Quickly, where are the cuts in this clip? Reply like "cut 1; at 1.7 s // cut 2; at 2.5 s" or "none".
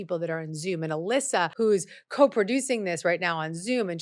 cut 1; at 1.5 s